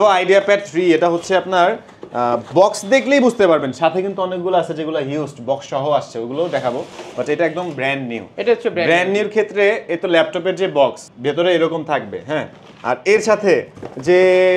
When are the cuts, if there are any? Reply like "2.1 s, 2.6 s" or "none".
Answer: none